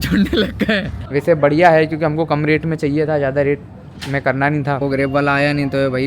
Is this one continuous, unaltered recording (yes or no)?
no